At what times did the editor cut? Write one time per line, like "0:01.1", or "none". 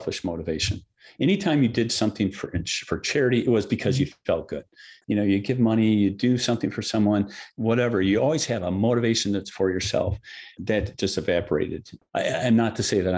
0:04.9
0:07.4
0:10.5